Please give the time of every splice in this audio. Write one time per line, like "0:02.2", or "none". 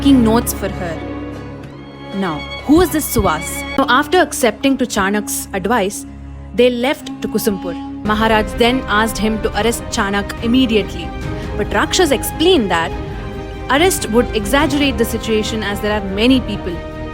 0:03.8
0:07.6